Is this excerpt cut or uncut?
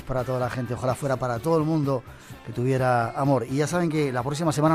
cut